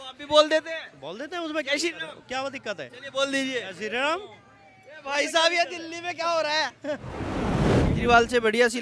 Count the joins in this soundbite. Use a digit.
1